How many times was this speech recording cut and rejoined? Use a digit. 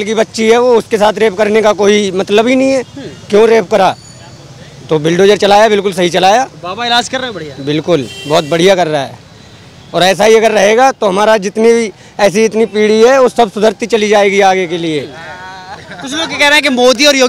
0